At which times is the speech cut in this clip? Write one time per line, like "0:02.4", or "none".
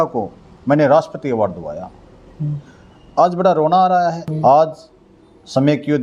0:04.2